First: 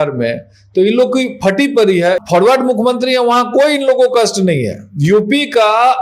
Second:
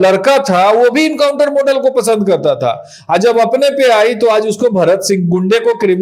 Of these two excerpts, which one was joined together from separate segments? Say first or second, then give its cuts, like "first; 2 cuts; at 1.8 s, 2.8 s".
first; 1 cut; at 2.2 s